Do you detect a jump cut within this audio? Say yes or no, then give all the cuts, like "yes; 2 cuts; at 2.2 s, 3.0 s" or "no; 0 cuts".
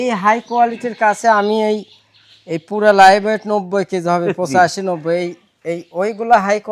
no; 0 cuts